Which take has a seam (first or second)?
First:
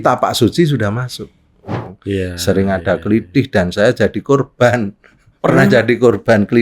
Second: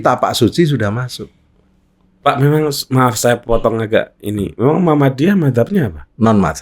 first